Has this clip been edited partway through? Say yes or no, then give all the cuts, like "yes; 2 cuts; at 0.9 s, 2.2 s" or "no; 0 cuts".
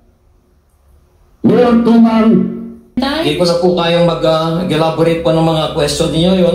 yes; 1 cut; at 3.0 s